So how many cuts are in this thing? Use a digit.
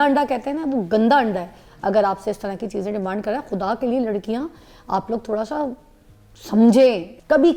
0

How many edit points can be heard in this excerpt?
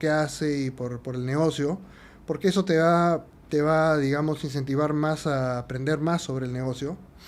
0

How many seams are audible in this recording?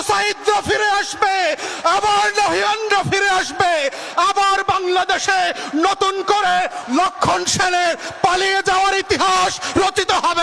1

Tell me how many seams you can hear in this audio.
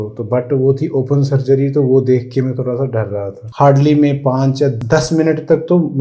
2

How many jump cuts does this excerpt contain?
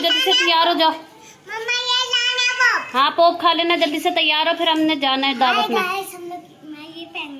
0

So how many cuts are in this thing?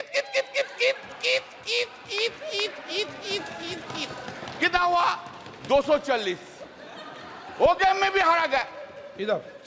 0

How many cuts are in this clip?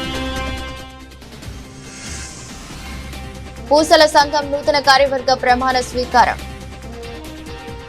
0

